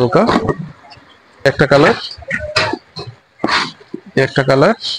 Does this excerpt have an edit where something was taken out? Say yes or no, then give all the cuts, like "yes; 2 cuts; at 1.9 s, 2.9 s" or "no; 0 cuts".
yes; 1 cut; at 1.4 s